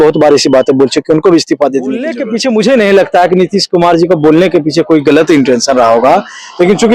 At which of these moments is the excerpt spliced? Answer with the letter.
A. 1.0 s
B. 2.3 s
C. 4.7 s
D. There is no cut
B